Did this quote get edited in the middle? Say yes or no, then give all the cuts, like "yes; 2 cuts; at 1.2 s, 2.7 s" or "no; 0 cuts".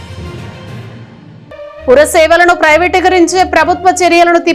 yes; 1 cut; at 1.4 s